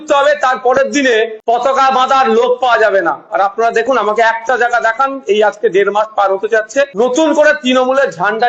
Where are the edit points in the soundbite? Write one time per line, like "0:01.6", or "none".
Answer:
0:01.4
0:06.9